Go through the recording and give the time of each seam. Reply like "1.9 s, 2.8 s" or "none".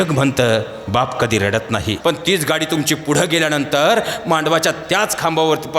1.9 s